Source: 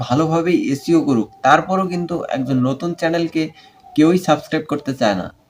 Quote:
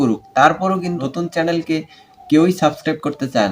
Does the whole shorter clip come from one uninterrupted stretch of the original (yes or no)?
no